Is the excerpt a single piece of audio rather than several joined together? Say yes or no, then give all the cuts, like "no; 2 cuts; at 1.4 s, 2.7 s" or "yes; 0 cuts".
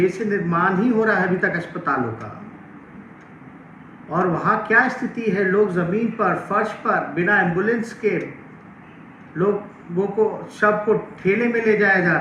yes; 0 cuts